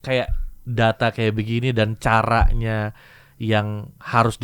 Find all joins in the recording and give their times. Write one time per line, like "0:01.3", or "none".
none